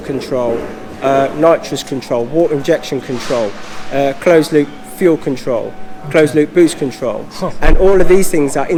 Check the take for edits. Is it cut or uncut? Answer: uncut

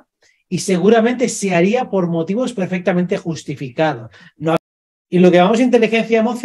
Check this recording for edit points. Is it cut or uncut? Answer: cut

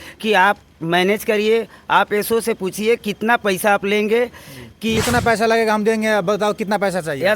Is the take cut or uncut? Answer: cut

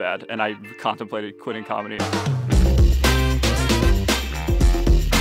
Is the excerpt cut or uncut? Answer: cut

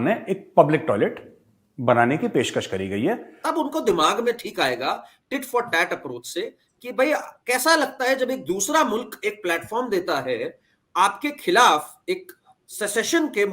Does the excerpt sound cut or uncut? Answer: cut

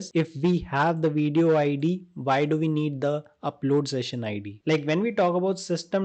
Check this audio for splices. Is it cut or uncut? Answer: cut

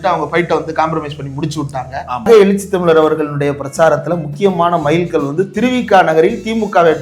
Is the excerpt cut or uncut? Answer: cut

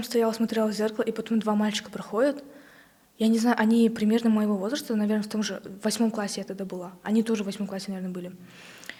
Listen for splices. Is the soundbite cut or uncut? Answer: uncut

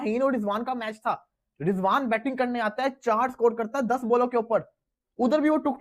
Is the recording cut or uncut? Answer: uncut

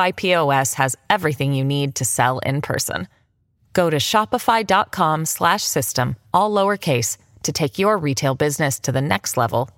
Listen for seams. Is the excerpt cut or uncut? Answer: uncut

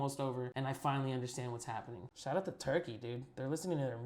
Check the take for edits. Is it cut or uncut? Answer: cut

